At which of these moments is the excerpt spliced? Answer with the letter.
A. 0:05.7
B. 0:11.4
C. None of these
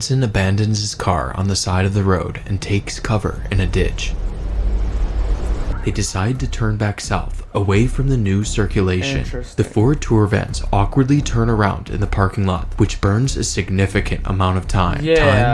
A